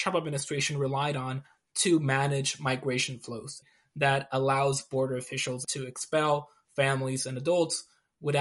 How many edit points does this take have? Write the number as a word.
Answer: two